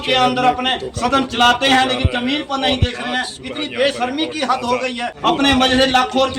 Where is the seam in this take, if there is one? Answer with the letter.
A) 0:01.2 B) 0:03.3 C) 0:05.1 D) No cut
C